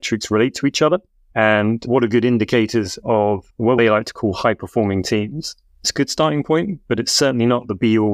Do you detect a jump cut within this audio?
yes; 3 cuts; at 1.2 s, 3.0 s, 5.9 s

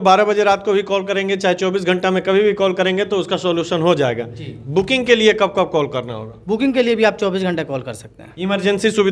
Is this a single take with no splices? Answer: yes; 0 cuts

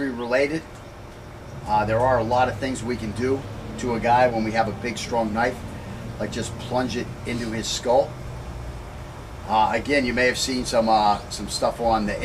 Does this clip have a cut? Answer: yes; 1 cut; at 10.8 s

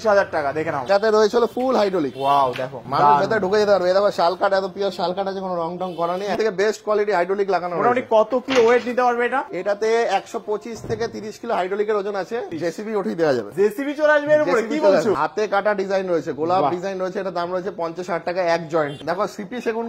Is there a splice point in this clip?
yes; 5 cuts; at 0.8 s, 6.4 s, 12.5 s, 15.2 s, 19.0 s

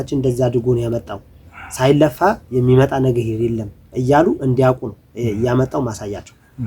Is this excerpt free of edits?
yes; 0 cuts

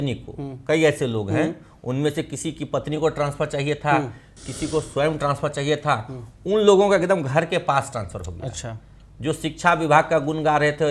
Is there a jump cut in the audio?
no; 0 cuts

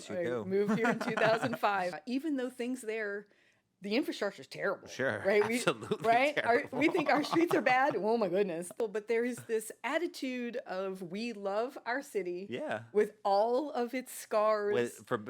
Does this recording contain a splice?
yes; 2 cuts; at 2.0 s, 8.8 s

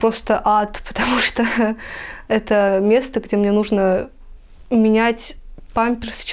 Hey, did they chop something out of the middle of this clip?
no; 0 cuts

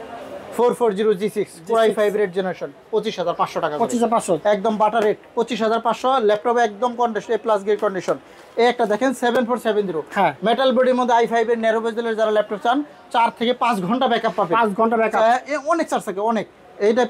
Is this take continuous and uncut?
yes; 0 cuts

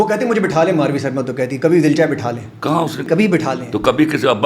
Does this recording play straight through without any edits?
no; 1 cut; at 3.0 s

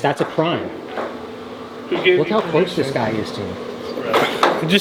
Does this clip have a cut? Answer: no; 0 cuts

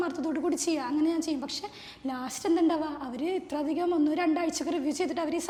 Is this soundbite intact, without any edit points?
yes; 0 cuts

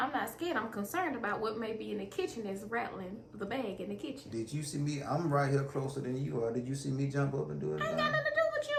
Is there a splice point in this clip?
no; 0 cuts

